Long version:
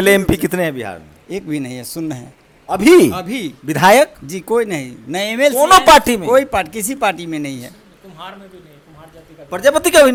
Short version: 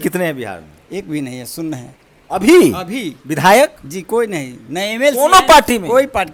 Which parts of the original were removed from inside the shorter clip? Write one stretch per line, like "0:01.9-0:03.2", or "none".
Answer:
none